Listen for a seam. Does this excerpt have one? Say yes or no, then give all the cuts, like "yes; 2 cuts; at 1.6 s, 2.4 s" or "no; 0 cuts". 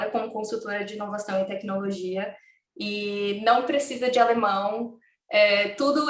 no; 0 cuts